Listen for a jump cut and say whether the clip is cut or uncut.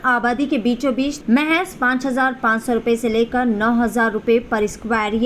cut